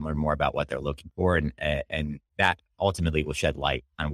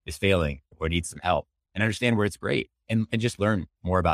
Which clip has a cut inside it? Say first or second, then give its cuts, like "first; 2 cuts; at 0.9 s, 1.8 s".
first; 1 cut; at 2.2 s